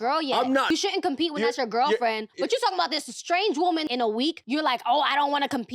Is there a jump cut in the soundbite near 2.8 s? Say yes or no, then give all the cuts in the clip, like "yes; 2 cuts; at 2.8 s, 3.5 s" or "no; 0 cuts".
no; 2 cuts; at 0.7 s, 4.0 s